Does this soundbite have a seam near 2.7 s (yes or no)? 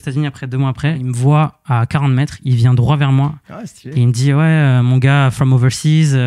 no